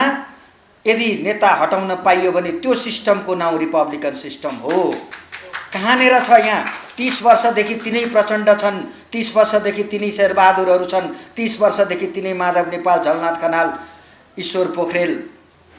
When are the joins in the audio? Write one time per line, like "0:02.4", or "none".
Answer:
none